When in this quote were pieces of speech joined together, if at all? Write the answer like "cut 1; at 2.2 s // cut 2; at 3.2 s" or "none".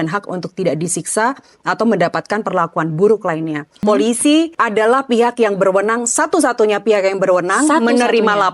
cut 1; at 3.8 s

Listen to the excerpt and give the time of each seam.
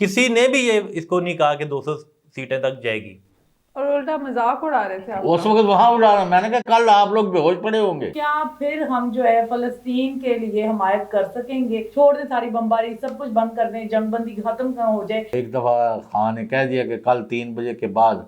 cut 1; at 8.1 s // cut 2; at 15.3 s

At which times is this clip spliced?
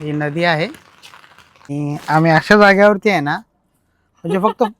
cut 1; at 1.7 s

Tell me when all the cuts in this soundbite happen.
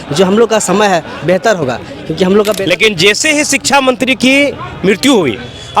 cut 1; at 2.6 s

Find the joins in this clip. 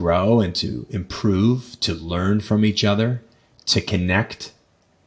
none

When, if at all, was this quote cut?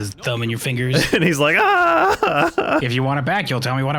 cut 1; at 2.9 s

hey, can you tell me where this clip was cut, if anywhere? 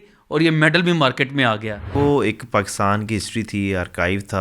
cut 1; at 1.9 s

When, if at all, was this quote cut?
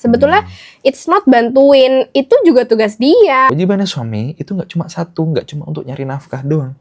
cut 1; at 3.5 s

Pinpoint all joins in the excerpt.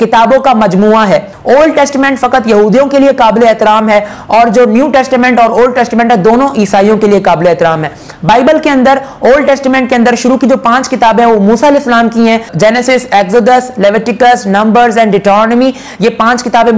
cut 1; at 1.3 s // cut 2; at 12.5 s

